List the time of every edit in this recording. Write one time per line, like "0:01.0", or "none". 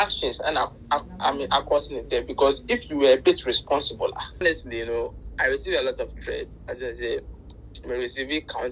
0:04.4